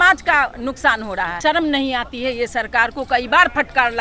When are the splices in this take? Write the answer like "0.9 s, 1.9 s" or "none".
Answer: 1.4 s